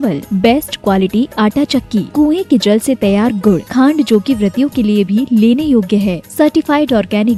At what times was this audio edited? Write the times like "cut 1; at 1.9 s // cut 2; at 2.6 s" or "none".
none

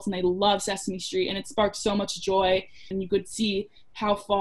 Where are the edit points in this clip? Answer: cut 1; at 2.9 s

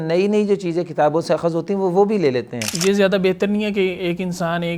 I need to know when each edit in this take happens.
cut 1; at 2.6 s

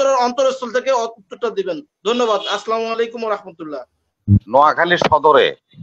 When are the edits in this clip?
none

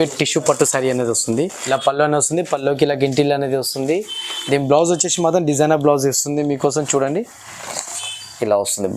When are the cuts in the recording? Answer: cut 1; at 1.6 s

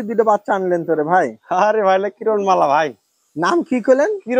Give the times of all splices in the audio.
none

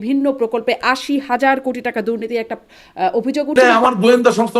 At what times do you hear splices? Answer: cut 1; at 3.5 s

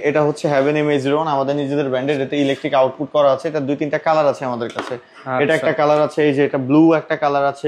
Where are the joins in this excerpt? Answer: none

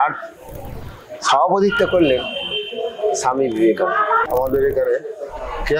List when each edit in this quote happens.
cut 1; at 4.2 s

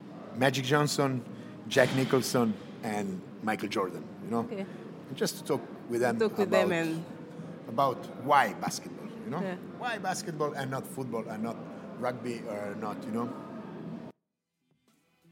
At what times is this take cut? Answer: cut 1; at 14.1 s

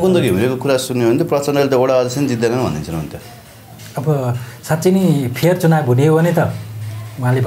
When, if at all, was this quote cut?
none

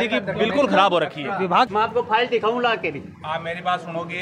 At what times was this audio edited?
cut 1; at 1.7 s

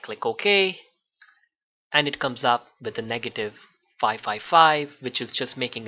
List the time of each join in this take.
cut 1; at 2.0 s

